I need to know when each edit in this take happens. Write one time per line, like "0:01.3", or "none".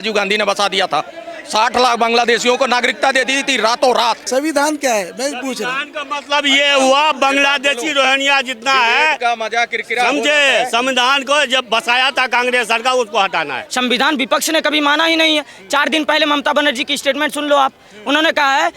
0:04.2
0:13.6